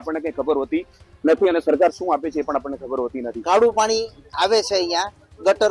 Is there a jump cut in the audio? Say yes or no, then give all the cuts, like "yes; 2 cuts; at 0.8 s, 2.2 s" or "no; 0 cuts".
yes; 1 cut; at 3.3 s